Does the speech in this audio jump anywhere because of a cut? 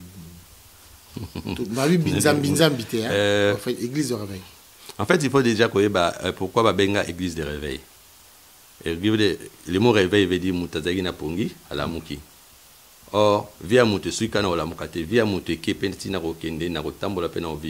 no; 0 cuts

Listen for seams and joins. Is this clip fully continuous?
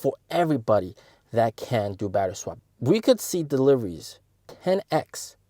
no; 1 cut; at 2.5 s

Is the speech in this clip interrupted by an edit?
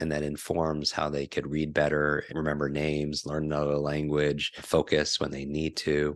yes; 2 cuts; at 2.3 s, 4.5 s

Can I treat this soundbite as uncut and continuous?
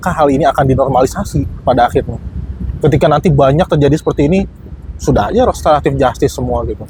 yes; 0 cuts

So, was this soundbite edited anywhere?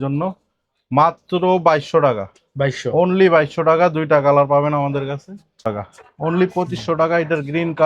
yes; 1 cut; at 5.7 s

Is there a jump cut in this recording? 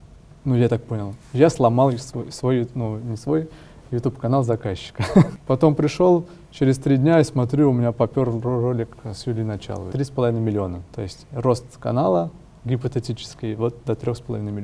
yes; 2 cuts; at 5.4 s, 9.9 s

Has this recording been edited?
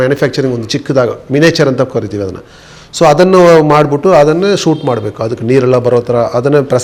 no; 0 cuts

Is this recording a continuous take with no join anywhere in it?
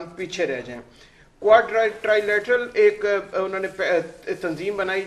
yes; 0 cuts

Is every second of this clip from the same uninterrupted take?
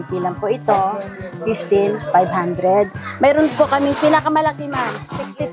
yes; 0 cuts

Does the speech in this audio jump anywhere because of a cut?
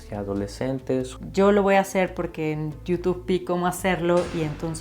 yes; 1 cut; at 1.2 s

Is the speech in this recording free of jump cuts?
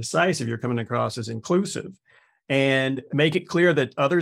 no; 1 cut; at 2.4 s

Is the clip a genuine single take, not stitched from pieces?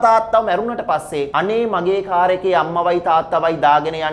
no; 1 cut; at 1.3 s

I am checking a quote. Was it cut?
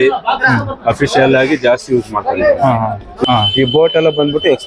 yes; 1 cut; at 3.2 s

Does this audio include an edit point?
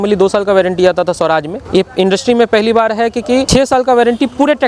yes; 2 cuts; at 1.6 s, 3.5 s

